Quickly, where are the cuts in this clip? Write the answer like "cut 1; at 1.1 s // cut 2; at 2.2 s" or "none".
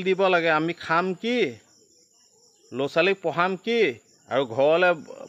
none